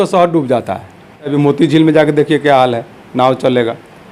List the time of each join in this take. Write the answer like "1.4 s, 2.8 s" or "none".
1.3 s

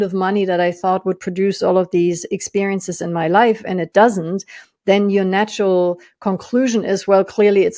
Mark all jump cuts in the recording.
none

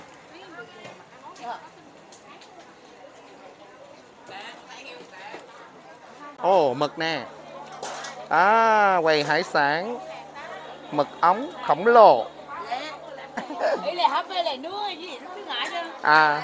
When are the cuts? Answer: 6.4 s, 13.4 s

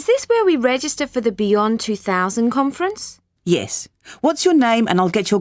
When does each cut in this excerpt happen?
none

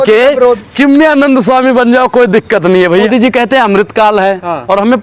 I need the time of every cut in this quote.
3.1 s

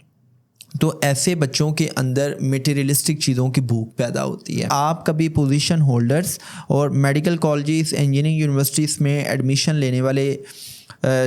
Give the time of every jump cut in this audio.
4.7 s

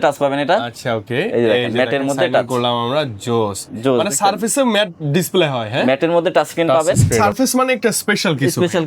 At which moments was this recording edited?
7.2 s

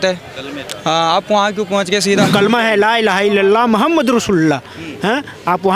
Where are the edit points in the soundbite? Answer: 2.3 s

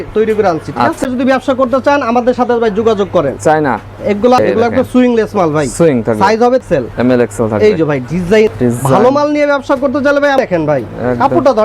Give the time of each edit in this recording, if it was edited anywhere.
1.0 s, 4.4 s, 6.6 s, 8.5 s, 10.4 s

